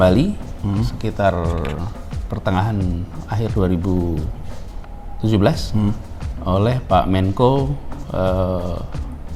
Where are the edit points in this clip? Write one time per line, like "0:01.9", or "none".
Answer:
none